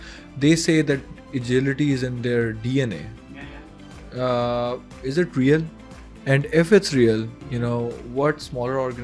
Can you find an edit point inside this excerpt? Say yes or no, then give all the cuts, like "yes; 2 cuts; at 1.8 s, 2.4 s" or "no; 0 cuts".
no; 0 cuts